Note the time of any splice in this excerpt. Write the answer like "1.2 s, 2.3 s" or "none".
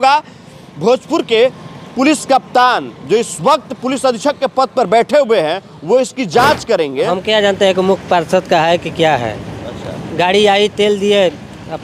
6.9 s